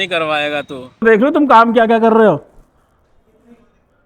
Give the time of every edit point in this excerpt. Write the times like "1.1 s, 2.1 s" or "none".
1.0 s